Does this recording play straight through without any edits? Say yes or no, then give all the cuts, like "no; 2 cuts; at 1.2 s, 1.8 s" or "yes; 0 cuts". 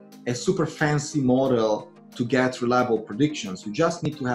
yes; 0 cuts